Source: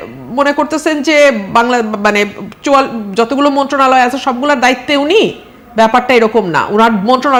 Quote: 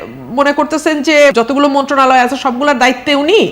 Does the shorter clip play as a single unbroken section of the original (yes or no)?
no